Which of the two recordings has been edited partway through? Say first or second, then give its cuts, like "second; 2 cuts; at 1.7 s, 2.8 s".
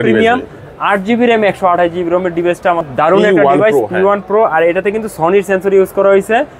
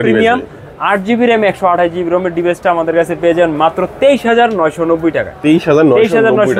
first; 1 cut; at 2.8 s